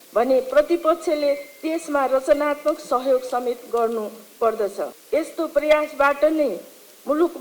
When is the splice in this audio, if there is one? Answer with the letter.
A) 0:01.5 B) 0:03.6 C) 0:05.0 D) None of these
C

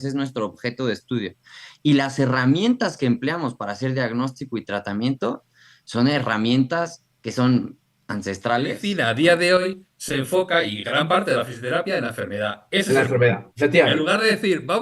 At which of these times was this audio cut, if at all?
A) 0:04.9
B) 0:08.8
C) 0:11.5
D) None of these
B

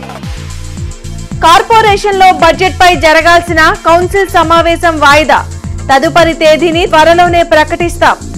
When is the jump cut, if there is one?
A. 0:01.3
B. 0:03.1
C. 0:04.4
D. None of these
A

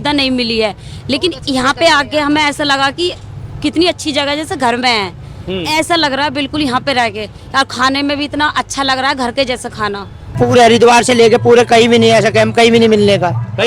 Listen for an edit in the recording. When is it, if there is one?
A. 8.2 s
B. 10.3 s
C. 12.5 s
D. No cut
B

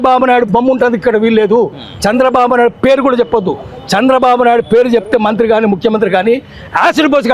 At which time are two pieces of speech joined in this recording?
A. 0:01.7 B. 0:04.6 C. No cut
C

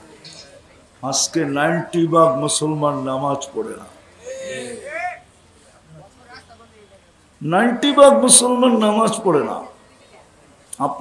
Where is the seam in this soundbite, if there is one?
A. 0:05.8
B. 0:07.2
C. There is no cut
C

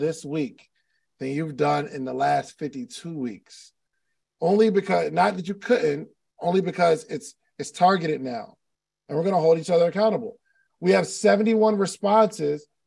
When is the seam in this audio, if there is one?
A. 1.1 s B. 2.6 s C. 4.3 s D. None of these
D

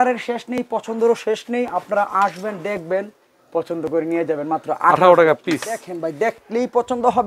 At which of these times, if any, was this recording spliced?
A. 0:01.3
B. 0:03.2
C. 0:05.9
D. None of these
C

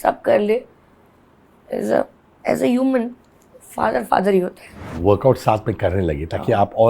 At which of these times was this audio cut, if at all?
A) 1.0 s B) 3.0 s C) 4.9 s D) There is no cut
C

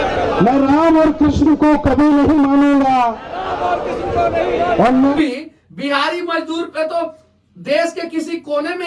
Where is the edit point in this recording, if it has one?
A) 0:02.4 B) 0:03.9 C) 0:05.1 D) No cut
C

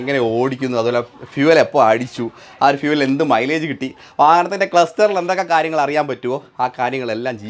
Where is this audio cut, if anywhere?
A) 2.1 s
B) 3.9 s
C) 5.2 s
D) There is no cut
D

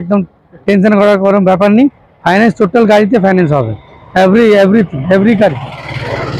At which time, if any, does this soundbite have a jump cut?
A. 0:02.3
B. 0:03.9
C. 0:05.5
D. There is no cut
D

